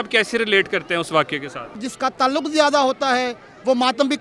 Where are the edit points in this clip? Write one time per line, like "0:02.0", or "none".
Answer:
0:01.9